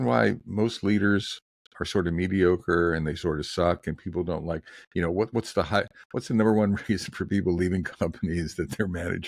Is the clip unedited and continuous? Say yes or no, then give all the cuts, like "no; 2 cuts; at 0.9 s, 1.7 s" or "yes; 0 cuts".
yes; 0 cuts